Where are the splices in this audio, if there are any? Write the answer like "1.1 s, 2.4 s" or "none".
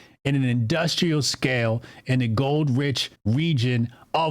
3.1 s

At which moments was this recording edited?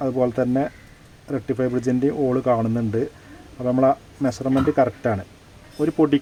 none

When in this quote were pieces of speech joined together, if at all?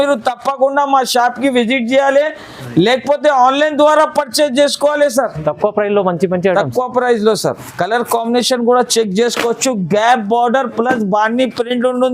7.6 s

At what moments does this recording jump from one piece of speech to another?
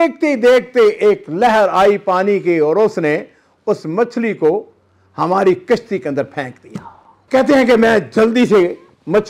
none

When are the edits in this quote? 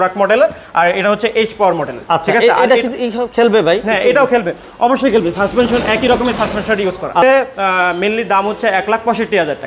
7.2 s

